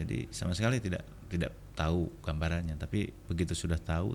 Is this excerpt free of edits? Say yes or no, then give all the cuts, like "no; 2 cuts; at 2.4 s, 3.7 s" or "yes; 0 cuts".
no; 1 cut; at 1.1 s